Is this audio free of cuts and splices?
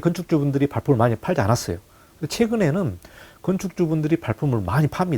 yes; 0 cuts

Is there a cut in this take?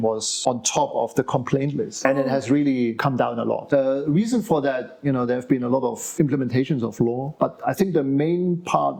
no; 0 cuts

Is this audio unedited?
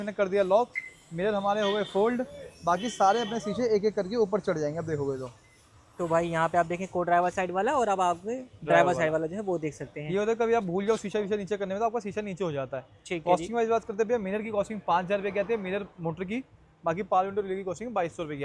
yes; 0 cuts

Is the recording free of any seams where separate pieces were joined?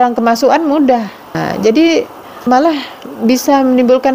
no; 2 cuts; at 1.4 s, 2.5 s

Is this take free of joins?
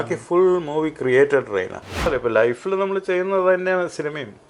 no; 1 cut; at 2.1 s

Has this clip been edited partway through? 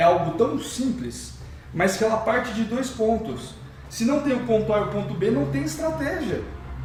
no; 0 cuts

